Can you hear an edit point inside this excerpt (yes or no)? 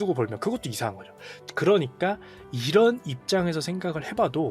no